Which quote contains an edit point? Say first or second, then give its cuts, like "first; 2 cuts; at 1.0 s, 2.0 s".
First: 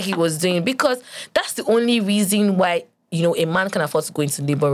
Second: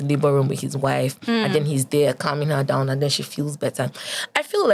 first; 1 cut; at 3.0 s